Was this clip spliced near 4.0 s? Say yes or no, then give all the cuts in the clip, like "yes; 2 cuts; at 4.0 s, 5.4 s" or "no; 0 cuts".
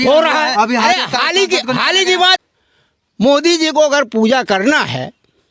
no; 2 cuts; at 0.9 s, 2.4 s